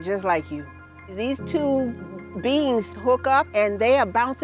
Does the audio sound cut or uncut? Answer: cut